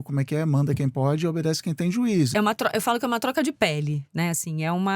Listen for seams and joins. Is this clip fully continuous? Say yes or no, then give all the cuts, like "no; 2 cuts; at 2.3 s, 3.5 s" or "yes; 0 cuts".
no; 1 cut; at 2.3 s